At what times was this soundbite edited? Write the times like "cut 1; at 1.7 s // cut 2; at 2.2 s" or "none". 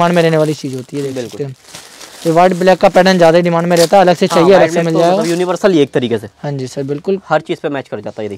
none